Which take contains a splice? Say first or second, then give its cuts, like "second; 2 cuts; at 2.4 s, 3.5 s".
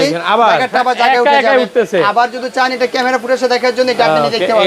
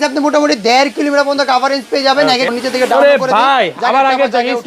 second; 1 cut; at 2.5 s